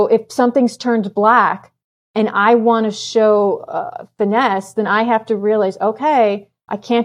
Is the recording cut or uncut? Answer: uncut